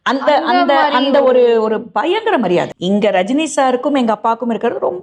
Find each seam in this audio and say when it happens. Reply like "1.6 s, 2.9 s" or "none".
2.7 s